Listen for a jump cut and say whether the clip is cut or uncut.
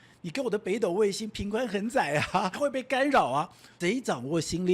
cut